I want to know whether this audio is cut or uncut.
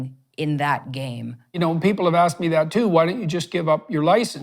cut